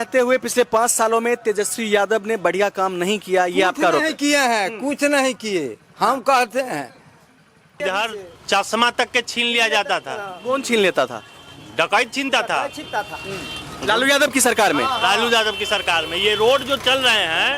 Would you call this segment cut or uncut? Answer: cut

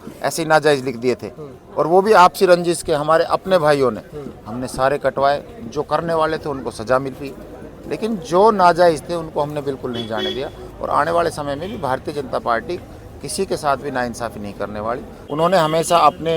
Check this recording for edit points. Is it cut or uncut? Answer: cut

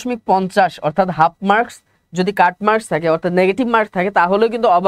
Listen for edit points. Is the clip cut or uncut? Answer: uncut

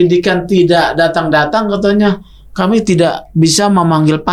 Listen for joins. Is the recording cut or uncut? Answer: uncut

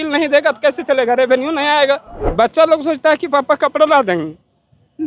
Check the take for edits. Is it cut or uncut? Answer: cut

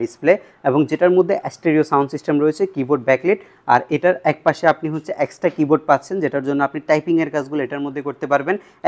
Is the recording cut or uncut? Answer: uncut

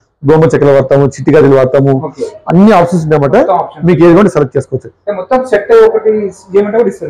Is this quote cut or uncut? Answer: uncut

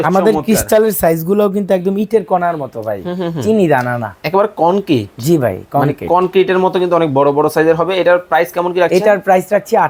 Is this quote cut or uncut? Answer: uncut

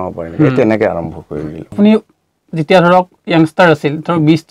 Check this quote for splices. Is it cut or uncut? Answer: cut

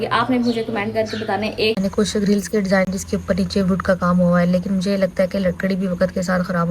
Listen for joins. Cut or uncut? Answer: cut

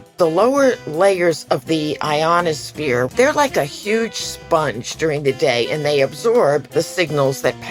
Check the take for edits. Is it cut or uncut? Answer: cut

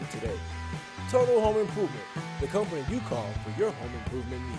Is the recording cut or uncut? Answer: uncut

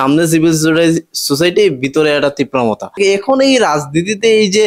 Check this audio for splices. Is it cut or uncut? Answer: cut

